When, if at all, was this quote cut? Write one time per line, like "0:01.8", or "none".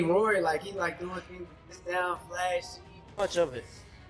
0:01.7
0:03.2

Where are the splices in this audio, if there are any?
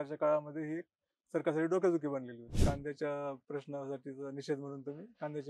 0:02.4

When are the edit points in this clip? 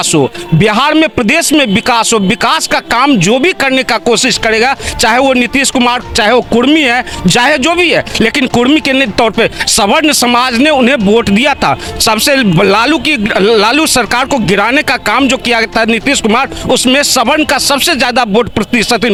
none

